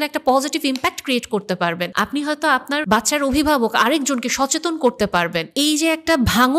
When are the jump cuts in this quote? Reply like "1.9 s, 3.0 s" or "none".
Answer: 1.9 s, 2.8 s, 5.5 s

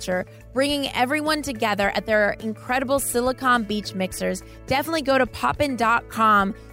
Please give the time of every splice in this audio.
none

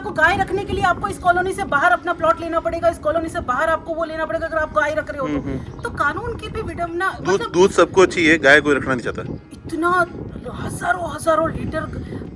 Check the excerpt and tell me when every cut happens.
none

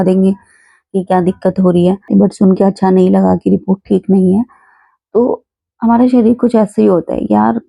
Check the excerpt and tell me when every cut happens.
2.1 s

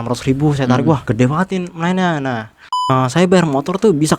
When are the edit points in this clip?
1.1 s, 2.9 s

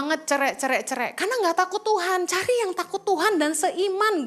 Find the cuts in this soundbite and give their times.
none

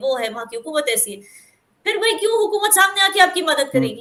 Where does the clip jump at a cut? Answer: none

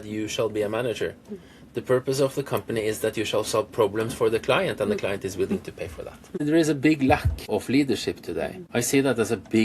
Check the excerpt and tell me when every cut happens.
6.4 s, 7.4 s, 8.6 s

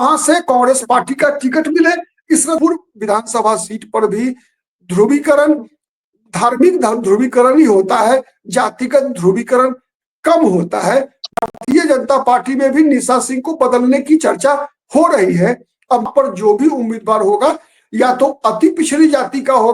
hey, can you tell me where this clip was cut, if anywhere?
2.6 s, 11.3 s, 16.1 s

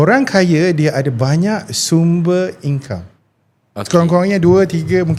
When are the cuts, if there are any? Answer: none

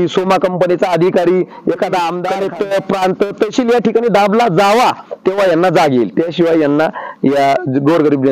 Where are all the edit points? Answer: 2.2 s

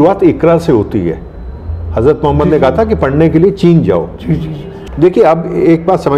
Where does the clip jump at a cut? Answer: 4.7 s

